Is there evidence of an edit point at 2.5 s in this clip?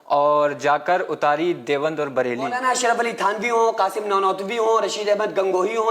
yes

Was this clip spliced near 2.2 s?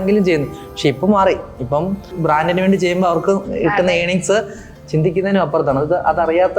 yes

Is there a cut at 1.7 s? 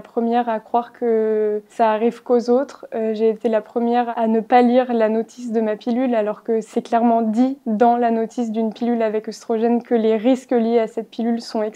yes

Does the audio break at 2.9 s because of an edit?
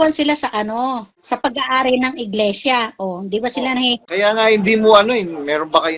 no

